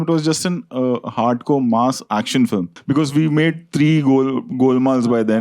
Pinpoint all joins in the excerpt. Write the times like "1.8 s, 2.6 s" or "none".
2.7 s